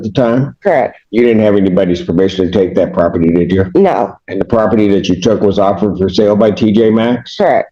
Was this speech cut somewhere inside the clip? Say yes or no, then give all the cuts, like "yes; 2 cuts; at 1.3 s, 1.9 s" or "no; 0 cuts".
no; 0 cuts